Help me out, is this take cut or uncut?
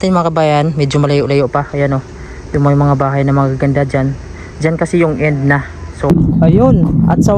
cut